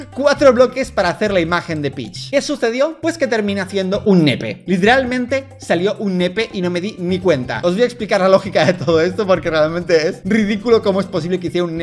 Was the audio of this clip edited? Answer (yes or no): no